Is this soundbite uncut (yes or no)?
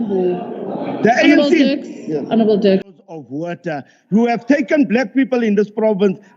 no